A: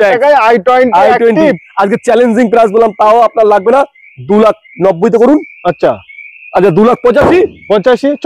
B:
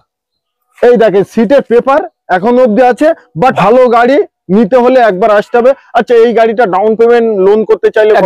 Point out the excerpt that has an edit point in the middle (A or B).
B